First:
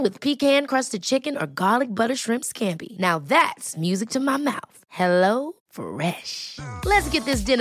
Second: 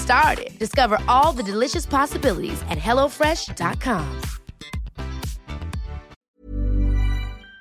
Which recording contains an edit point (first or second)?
second